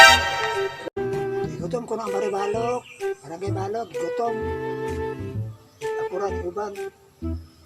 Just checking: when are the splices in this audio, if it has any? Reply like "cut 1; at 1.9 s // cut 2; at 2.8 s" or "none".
cut 1; at 1.0 s